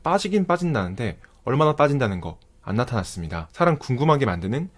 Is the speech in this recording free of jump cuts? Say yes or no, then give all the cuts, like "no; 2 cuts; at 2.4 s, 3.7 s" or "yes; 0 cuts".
no; 1 cut; at 3.4 s